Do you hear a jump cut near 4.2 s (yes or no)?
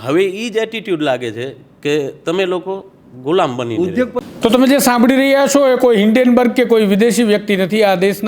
yes